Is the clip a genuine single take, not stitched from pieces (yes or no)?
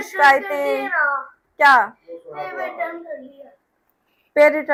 yes